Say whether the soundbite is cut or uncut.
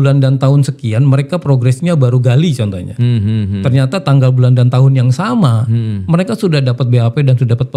uncut